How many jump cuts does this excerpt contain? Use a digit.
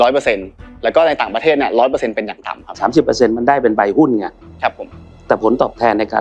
1